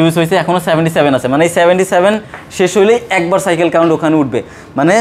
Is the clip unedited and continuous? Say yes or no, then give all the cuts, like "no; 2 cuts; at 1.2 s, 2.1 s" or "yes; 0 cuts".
yes; 0 cuts